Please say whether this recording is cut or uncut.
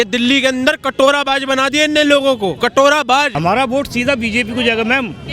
cut